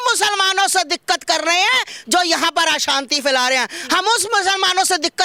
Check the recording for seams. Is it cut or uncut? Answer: uncut